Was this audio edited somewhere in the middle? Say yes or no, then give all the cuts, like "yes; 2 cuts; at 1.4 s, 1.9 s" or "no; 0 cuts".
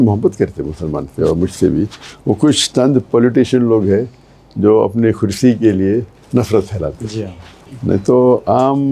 no; 0 cuts